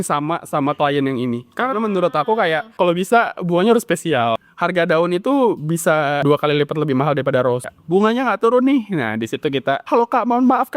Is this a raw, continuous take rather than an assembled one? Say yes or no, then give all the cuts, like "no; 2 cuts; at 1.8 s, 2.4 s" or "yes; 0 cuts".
no; 5 cuts; at 2.7 s, 4.5 s, 6.2 s, 7.7 s, 9.8 s